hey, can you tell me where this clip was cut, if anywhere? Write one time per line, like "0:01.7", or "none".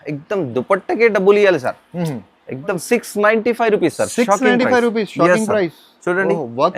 0:02.8